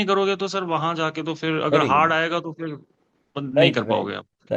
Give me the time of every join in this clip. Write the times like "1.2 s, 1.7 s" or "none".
none